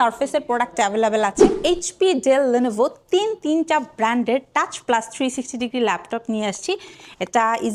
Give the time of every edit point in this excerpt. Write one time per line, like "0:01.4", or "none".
0:01.5